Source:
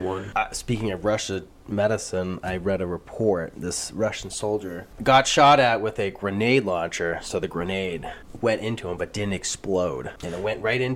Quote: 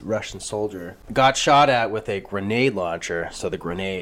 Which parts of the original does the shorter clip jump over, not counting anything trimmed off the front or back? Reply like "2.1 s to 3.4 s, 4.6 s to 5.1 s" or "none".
none